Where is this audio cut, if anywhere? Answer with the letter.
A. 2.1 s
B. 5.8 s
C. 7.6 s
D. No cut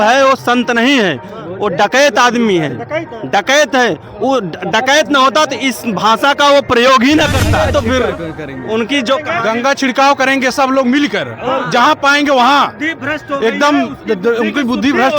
C